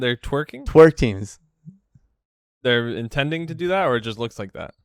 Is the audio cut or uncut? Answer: uncut